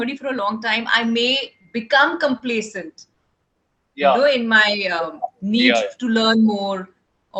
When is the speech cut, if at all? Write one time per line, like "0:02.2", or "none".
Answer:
none